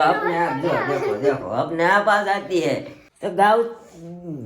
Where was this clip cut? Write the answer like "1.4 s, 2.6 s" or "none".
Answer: 3.1 s

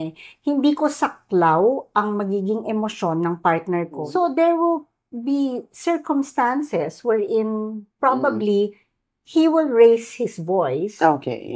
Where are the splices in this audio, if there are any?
4.0 s

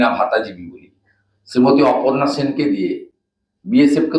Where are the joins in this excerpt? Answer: none

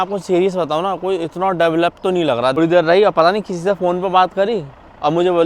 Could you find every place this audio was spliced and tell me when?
2.6 s

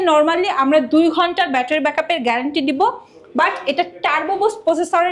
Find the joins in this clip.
none

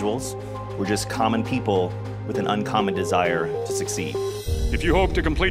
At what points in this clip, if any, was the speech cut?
4.4 s

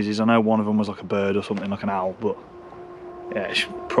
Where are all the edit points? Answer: none

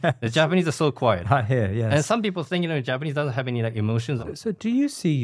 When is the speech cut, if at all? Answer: 4.2 s

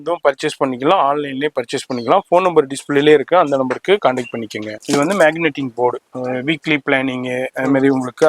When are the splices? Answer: 4.6 s

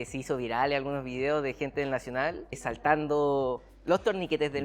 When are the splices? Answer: 2.7 s

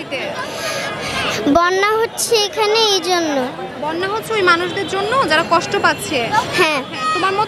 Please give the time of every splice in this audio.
none

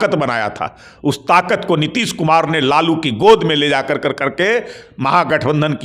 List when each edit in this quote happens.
none

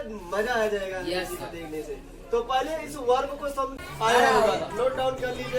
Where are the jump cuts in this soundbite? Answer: 3.8 s

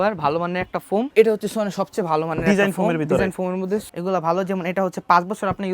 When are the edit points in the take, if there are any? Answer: 1.1 s, 3.9 s

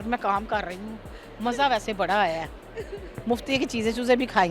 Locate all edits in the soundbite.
none

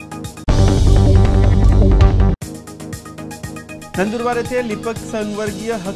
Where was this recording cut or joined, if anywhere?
none

